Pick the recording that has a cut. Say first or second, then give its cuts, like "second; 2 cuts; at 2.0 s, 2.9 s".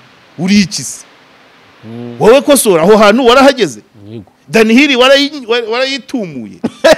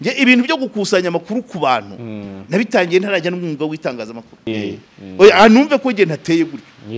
second; 1 cut; at 4.5 s